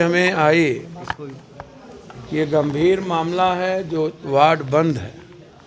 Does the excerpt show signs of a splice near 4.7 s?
no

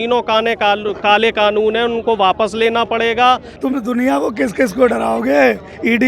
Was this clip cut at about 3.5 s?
yes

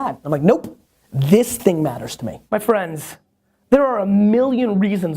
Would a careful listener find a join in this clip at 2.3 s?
yes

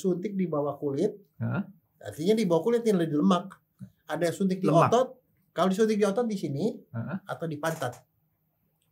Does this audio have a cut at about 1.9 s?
no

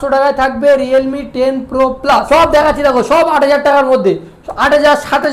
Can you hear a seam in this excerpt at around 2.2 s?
yes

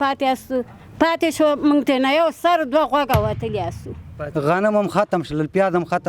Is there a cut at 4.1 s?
yes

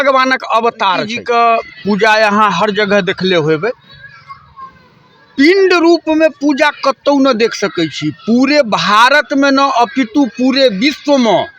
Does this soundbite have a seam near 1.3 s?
yes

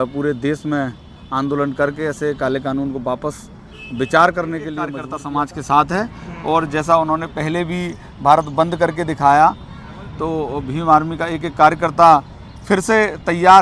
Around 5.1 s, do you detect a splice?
yes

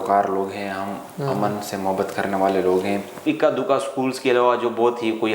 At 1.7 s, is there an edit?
no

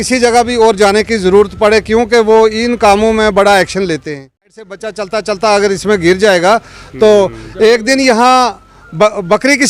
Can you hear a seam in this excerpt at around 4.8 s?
yes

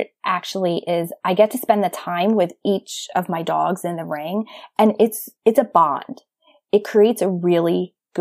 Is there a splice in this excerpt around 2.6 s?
no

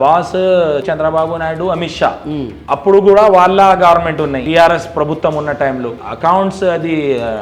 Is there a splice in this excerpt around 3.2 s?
no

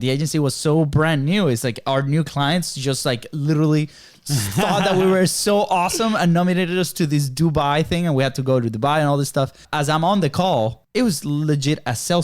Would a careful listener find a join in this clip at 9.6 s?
yes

